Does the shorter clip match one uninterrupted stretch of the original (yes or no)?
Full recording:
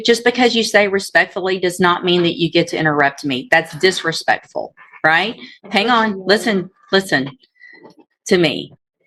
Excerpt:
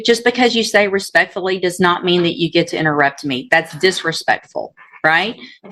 yes